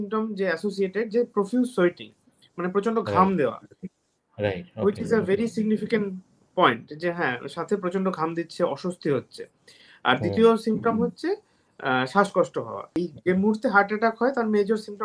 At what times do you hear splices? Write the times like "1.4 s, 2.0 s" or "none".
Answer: 13.0 s